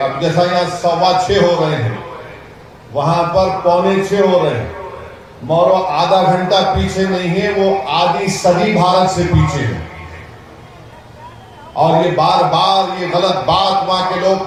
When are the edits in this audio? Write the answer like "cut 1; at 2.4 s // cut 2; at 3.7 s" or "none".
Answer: none